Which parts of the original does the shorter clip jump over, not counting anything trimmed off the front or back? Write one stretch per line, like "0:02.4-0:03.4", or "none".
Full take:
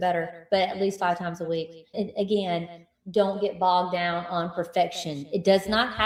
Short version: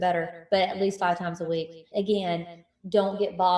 0:01.9-0:02.1